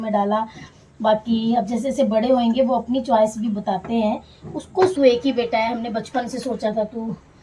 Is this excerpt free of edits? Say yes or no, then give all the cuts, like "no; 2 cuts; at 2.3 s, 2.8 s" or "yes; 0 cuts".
no; 1 cut; at 4.9 s